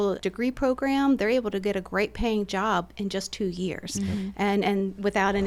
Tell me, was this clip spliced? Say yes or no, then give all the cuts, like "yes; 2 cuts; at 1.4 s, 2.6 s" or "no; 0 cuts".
no; 0 cuts